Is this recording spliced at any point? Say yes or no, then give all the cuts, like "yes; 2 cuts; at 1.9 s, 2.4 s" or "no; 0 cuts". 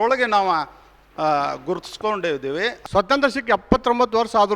yes; 1 cut; at 2.8 s